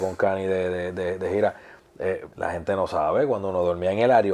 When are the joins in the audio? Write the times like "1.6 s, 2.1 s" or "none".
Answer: 2.3 s